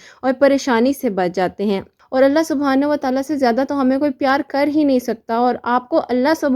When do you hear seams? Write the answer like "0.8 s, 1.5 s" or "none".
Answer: 2.0 s